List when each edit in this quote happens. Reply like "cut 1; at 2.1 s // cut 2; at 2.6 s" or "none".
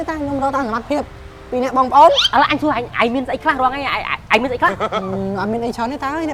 none